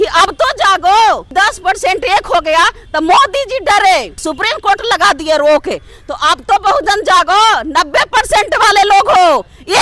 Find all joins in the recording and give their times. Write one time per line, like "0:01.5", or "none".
0:01.2
0:04.2